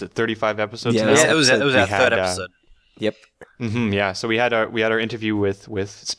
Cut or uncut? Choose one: uncut